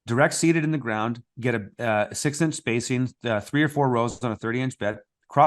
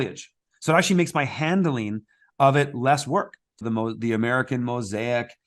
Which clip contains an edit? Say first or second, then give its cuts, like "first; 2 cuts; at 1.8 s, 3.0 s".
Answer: second; 1 cut; at 3.5 s